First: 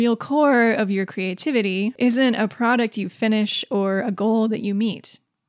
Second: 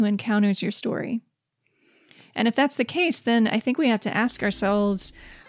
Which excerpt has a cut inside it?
first; 1 cut; at 1.9 s

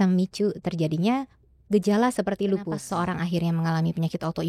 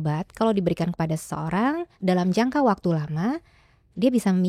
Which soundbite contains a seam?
first; 1 cut; at 2.8 s

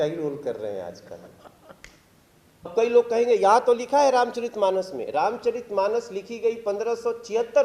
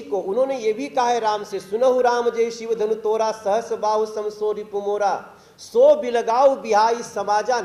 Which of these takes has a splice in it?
first; 1 cut; at 2.7 s

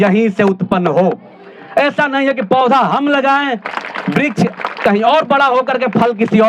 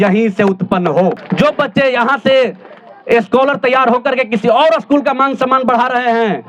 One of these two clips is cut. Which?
second; 1 cut; at 1.2 s

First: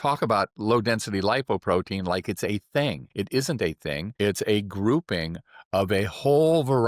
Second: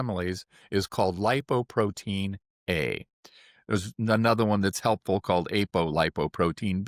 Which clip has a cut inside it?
first; 2 cuts; at 3.0 s, 4.1 s

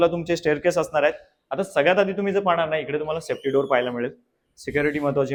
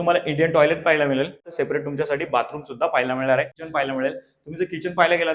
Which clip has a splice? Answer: second; 2 cuts; at 1.4 s, 3.6 s

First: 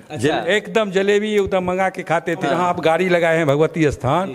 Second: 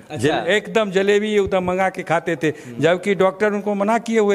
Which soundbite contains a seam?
first; 1 cut; at 2.4 s

